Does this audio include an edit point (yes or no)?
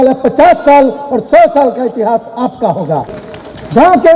yes